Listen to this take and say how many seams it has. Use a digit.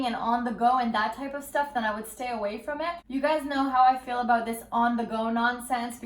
1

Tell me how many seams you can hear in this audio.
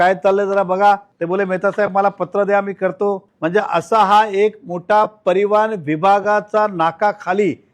2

